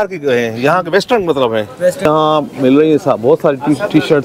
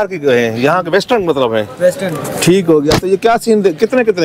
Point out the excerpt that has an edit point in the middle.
first; 1 cut; at 2.1 s

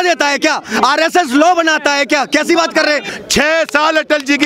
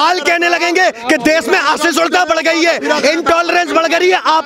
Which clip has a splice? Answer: first; 1 cut; at 3.0 s

